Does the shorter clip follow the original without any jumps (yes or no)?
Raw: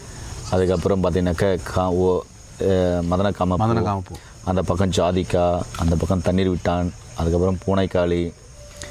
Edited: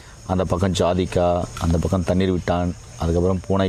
yes